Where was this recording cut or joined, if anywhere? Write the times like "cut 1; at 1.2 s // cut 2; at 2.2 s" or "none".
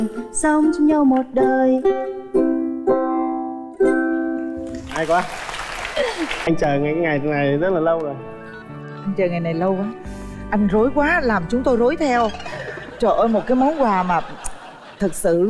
cut 1; at 6.5 s